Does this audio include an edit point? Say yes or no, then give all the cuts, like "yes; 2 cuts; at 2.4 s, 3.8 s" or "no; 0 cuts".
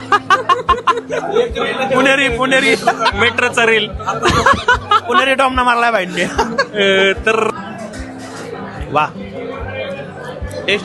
yes; 1 cut; at 7.5 s